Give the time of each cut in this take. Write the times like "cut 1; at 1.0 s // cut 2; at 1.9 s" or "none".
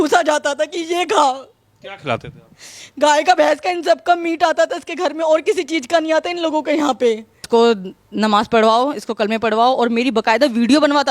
cut 1; at 7.5 s

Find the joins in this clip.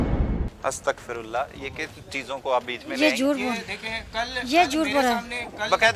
none

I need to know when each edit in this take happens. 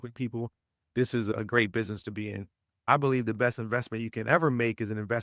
cut 1; at 2.9 s

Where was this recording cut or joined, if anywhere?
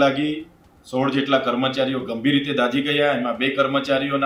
none

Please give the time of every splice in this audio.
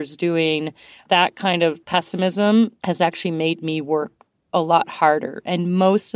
cut 1; at 0.9 s // cut 2; at 1.8 s // cut 3; at 2.8 s

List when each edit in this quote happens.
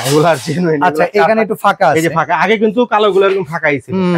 none

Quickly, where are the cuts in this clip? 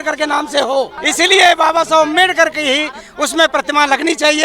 cut 1; at 1.0 s

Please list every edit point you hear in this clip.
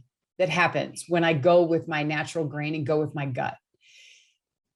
none

